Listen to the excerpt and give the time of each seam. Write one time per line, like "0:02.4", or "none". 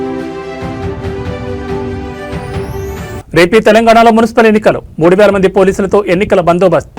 0:02.1
0:03.0